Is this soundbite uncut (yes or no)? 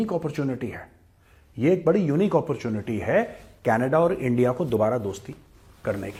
yes